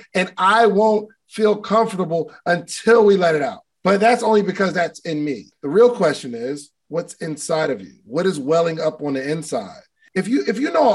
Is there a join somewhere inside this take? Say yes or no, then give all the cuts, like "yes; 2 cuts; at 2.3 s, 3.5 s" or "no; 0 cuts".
yes; 3 cuts; at 3.6 s, 5.5 s, 10.0 s